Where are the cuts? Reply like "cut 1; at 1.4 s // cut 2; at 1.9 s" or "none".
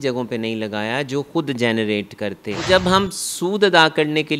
cut 1; at 2.6 s